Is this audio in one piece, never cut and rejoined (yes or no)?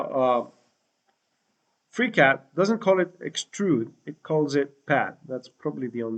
yes